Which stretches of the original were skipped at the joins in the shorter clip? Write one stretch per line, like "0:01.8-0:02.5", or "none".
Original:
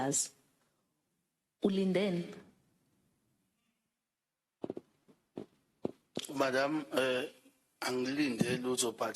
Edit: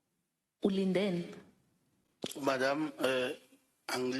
0:03.2-0:06.1